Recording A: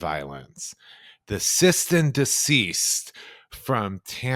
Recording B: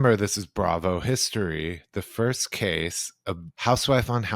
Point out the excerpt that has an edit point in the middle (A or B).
B